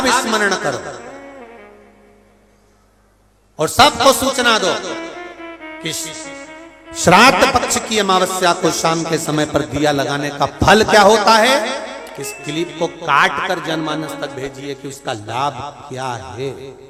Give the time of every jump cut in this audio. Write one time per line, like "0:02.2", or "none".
none